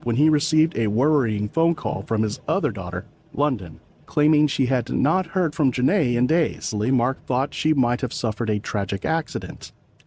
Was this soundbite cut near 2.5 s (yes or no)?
no